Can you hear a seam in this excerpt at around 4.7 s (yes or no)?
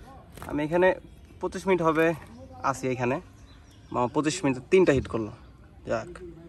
no